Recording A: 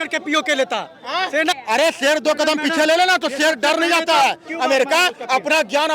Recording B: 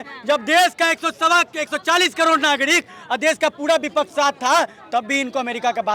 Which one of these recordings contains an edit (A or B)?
A